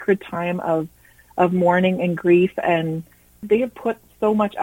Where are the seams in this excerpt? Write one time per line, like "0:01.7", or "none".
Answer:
0:03.4